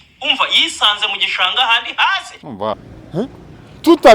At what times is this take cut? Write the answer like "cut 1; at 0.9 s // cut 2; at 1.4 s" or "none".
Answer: cut 1; at 2.9 s